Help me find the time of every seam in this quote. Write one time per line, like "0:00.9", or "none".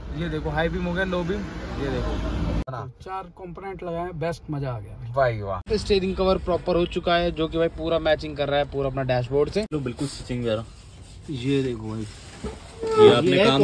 0:02.6
0:05.7
0:09.7